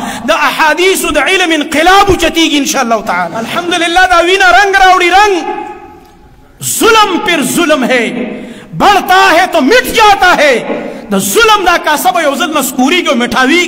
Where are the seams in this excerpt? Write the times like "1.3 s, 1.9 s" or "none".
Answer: 3.4 s